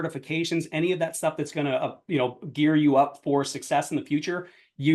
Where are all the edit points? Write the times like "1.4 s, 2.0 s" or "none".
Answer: none